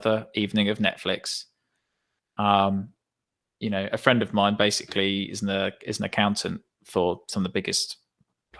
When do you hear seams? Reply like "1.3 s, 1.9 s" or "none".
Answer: none